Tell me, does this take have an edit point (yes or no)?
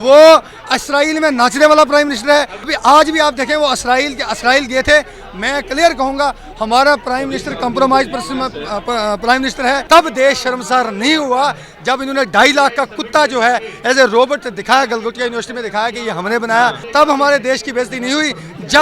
yes